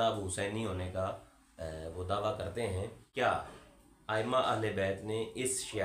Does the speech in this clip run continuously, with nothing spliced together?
no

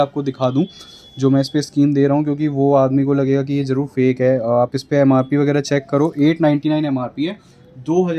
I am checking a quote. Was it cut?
no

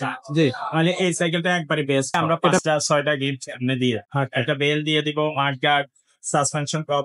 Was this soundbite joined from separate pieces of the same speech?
yes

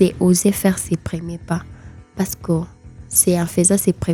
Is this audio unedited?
yes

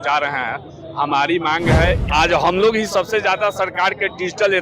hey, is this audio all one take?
no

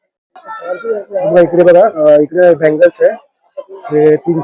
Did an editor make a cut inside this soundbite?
no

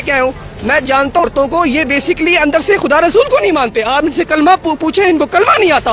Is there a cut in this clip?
yes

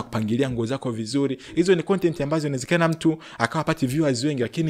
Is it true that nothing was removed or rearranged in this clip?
yes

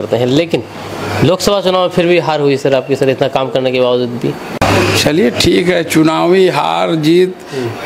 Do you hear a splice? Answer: yes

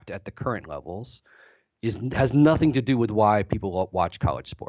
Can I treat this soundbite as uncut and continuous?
yes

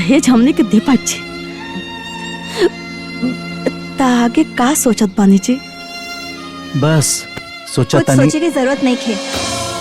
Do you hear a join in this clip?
no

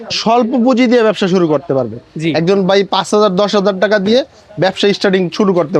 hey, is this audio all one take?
yes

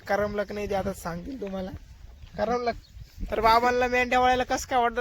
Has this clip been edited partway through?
yes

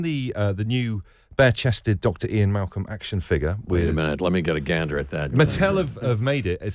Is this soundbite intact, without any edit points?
no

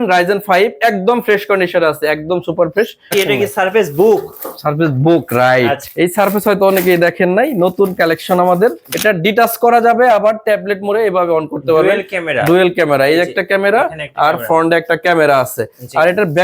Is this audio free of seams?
no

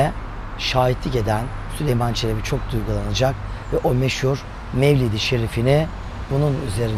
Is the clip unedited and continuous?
yes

